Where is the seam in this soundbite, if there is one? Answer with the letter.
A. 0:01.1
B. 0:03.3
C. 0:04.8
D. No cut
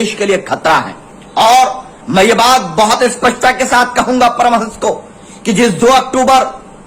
D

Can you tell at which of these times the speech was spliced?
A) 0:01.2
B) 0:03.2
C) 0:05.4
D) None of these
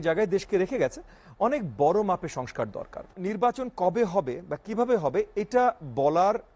B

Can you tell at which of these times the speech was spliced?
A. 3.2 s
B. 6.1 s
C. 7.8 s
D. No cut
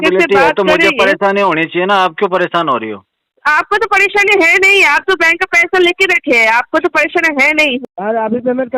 C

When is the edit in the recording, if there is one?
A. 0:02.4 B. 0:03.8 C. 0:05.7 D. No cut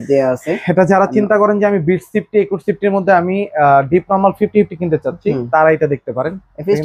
D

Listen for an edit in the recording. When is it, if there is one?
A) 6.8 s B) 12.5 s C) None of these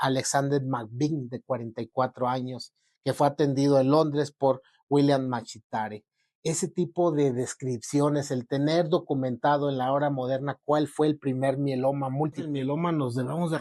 B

